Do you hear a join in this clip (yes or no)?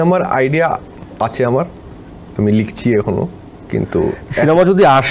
no